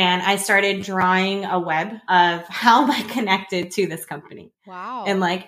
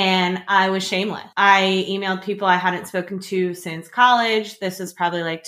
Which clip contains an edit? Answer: second; 1 cut; at 1.2 s

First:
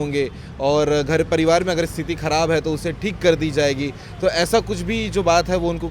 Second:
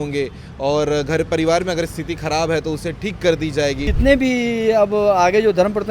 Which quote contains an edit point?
second; 1 cut; at 3.9 s

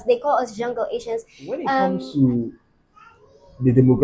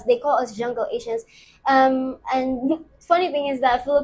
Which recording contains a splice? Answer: first; 1 cut; at 1.7 s

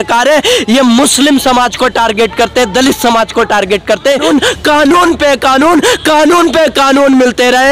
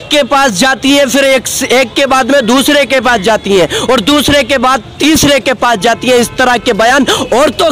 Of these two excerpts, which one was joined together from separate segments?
first; 1 cut; at 4.2 s

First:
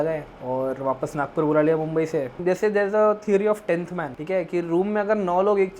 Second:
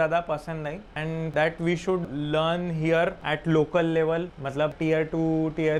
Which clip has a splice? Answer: first; 1 cut; at 2.3 s

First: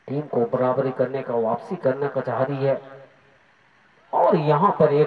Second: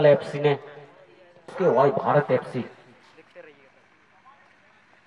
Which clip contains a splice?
second; 1 cut; at 1.5 s

